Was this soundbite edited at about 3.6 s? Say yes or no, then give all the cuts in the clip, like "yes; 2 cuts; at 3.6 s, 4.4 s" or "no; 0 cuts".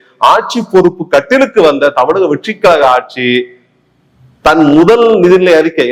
no; 0 cuts